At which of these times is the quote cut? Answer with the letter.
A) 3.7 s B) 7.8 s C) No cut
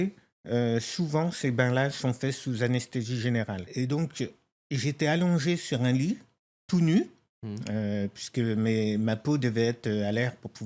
A